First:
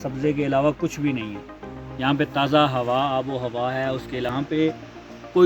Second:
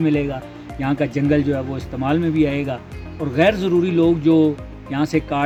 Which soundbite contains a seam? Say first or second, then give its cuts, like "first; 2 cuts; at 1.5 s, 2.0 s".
first; 1 cut; at 4.3 s